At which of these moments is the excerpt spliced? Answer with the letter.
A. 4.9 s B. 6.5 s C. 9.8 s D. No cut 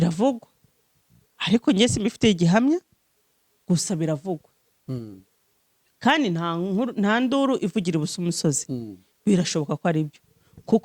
D